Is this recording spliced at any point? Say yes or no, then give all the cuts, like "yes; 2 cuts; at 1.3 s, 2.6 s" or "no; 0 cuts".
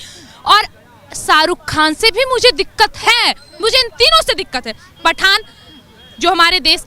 no; 0 cuts